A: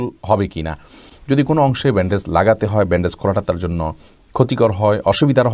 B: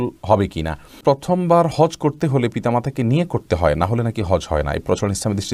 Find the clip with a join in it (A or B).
B